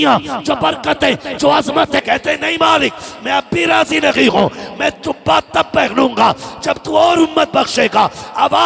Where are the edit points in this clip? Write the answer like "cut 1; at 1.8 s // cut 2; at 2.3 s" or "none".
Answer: cut 1; at 2.0 s